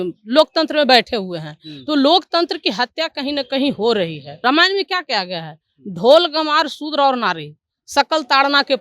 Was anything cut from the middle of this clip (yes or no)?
yes